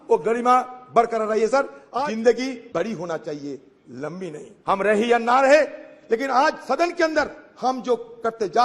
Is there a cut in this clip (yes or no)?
yes